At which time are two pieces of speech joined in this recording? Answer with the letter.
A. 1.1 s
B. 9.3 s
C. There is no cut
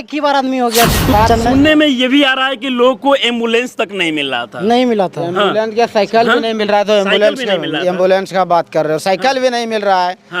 A